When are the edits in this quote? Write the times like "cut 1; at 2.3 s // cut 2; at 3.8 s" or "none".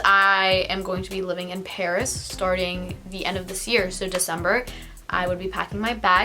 none